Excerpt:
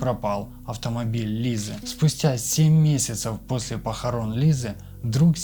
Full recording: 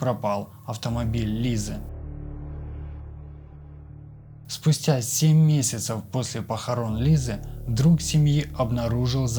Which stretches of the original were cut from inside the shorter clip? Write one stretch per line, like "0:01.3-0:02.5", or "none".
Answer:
0:01.8-0:04.5